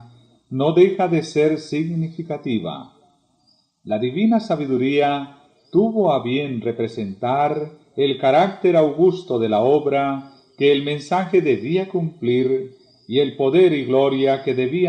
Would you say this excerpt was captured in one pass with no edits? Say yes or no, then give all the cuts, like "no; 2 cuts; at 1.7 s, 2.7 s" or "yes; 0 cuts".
no; 1 cut; at 11.0 s